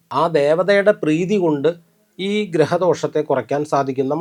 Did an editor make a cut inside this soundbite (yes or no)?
no